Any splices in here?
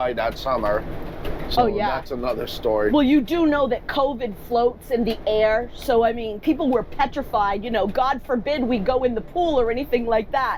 no; 0 cuts

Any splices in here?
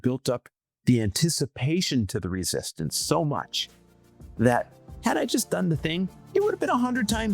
yes; 1 cut; at 6.2 s

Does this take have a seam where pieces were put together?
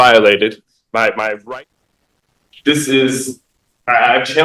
yes; 1 cut; at 1.4 s

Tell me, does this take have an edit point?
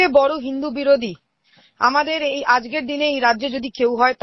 no; 0 cuts

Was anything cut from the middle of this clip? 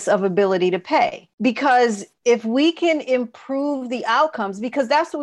yes; 2 cuts; at 1.2 s, 2.1 s

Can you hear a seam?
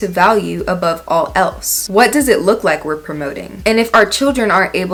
no; 0 cuts

